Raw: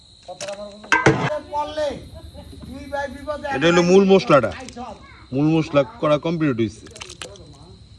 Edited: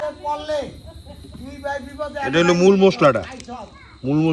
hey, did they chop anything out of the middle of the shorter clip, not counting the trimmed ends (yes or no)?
no